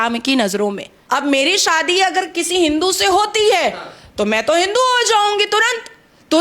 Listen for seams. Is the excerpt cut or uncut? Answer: cut